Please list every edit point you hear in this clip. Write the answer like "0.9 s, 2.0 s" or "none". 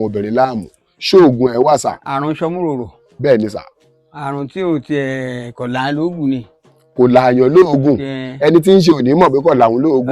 2.1 s